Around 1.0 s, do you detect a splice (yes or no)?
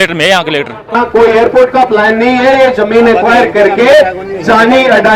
yes